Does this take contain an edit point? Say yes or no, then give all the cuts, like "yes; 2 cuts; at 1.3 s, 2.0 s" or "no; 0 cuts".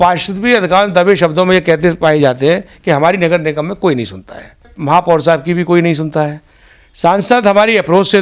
yes; 1 cut; at 4.7 s